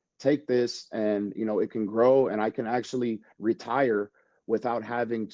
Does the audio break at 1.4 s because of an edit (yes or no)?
no